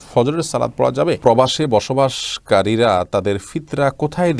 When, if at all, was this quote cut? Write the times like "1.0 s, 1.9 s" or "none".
1.2 s